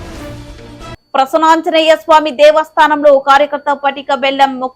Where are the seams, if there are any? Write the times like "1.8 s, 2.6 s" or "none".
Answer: 0.9 s